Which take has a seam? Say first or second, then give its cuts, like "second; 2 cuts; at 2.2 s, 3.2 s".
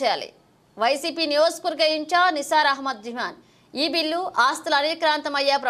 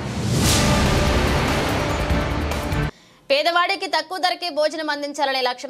second; 1 cut; at 2.7 s